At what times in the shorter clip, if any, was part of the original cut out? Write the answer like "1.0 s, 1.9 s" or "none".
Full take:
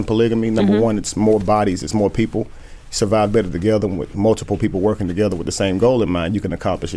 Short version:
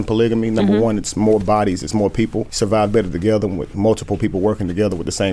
2.5 s